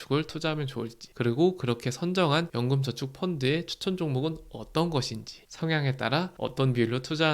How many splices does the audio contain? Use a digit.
2